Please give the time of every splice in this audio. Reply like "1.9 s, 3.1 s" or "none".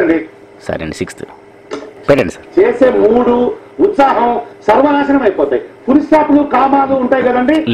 2.0 s

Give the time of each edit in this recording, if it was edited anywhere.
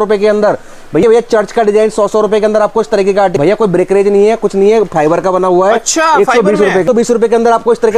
1.0 s, 3.3 s, 6.8 s

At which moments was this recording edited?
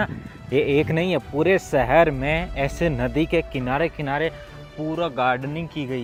none

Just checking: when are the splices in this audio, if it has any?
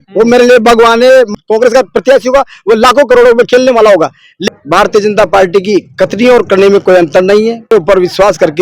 1.3 s, 4.5 s, 7.7 s

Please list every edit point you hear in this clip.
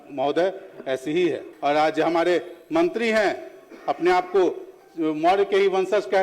1.5 s

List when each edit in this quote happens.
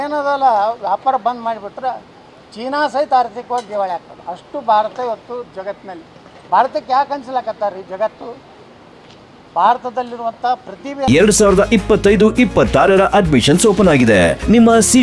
11.1 s

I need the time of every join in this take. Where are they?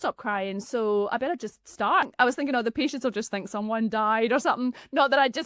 2.1 s

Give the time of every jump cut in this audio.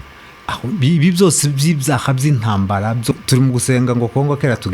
3.1 s

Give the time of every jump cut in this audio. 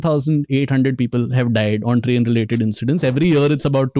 none

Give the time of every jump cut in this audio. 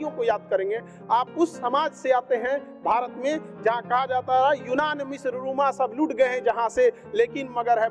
none

